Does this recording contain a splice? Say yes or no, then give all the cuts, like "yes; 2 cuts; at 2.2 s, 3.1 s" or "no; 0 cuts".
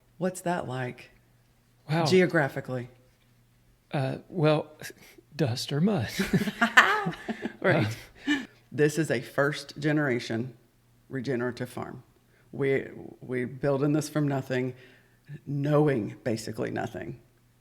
yes; 1 cut; at 8.5 s